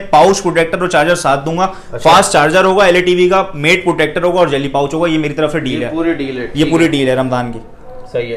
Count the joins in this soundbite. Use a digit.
0